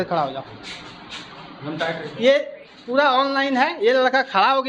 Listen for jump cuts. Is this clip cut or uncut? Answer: uncut